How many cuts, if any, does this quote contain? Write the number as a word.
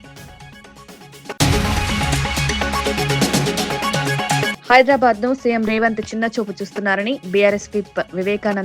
two